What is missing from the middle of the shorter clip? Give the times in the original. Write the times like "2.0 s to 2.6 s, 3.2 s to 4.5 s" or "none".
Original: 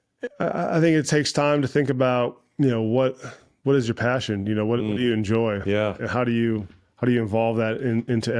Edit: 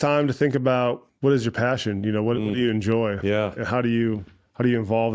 2.4 s to 3.5 s